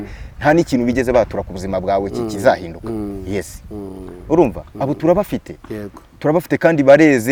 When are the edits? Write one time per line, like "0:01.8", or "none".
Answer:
none